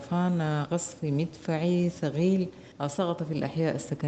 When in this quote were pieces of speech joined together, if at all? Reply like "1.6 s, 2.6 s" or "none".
none